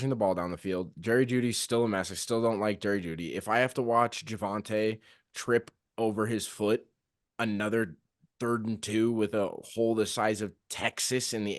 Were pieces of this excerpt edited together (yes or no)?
no